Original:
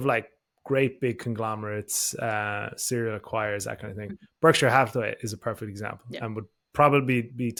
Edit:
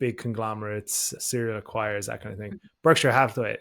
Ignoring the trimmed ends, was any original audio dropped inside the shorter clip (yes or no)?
yes